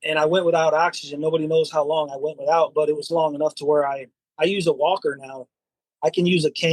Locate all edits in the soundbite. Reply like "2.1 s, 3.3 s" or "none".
5.8 s